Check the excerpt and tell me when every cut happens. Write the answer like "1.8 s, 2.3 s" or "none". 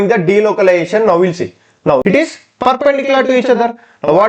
2.0 s